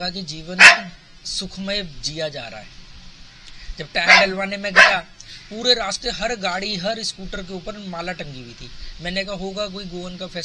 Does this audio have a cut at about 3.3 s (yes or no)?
no